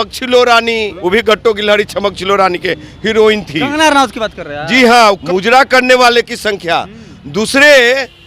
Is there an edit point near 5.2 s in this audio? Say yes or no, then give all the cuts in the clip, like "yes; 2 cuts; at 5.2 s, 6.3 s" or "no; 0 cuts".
yes; 2 cuts; at 0.9 s, 5.2 s